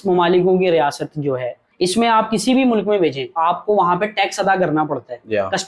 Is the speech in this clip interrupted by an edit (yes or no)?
yes